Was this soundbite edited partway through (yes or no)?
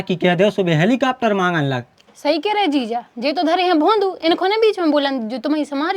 no